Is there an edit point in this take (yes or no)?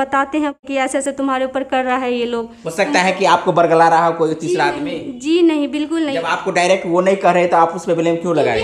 yes